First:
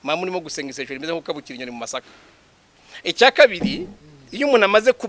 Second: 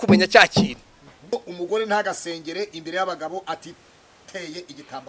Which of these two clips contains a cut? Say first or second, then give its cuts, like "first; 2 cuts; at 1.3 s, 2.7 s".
second; 1 cut; at 1.3 s